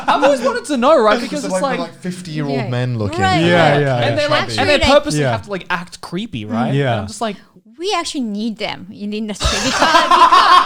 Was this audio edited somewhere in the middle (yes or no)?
no